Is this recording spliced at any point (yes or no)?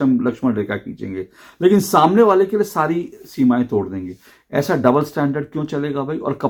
no